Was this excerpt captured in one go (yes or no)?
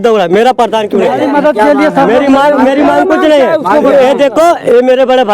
no